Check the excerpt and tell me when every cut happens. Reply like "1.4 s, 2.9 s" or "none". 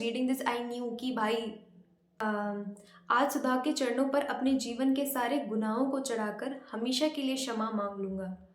2.0 s